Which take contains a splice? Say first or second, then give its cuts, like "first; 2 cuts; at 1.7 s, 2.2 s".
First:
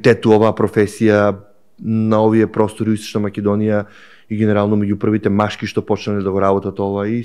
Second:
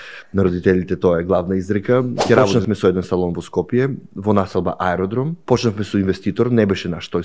second; 2 cuts; at 2.5 s, 5.3 s